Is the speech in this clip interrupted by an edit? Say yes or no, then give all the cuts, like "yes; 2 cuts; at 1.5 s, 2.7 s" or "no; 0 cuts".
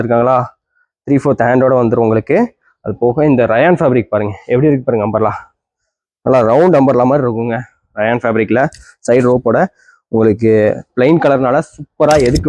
no; 0 cuts